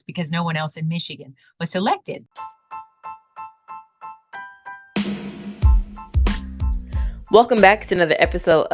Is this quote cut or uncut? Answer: cut